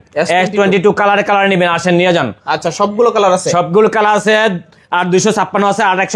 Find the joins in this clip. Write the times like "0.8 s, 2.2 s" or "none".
none